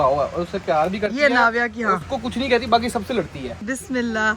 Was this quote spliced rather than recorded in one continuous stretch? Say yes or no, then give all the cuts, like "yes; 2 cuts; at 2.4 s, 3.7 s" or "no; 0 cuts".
yes; 1 cut; at 3.5 s